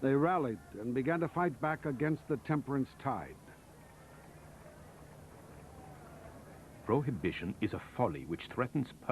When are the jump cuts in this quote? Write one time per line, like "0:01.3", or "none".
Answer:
0:05.8